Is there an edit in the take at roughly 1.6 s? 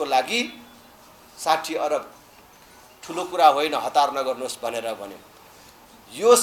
no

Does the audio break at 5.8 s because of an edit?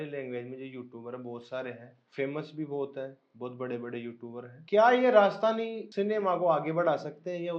yes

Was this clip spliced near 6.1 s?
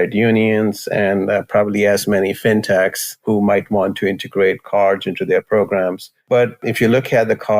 yes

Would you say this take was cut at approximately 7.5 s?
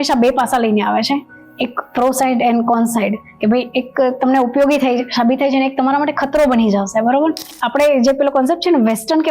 yes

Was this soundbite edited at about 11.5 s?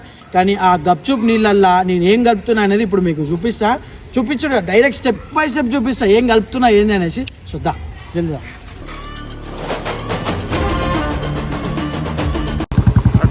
no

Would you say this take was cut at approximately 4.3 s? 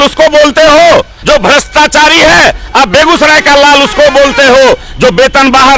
no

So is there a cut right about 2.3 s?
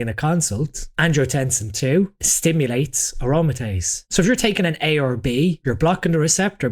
yes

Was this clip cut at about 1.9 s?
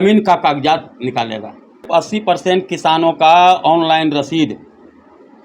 yes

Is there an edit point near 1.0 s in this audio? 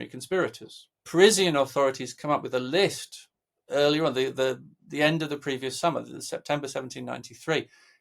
yes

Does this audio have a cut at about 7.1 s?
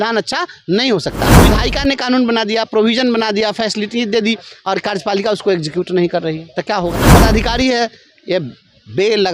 yes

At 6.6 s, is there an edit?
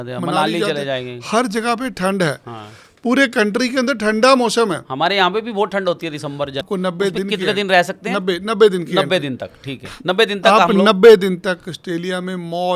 yes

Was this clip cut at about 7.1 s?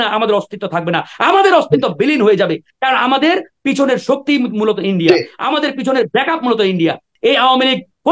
yes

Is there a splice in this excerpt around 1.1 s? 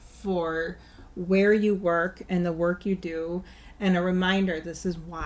no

